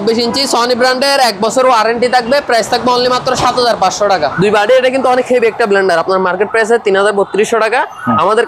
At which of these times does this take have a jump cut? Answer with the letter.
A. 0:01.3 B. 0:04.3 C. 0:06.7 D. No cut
B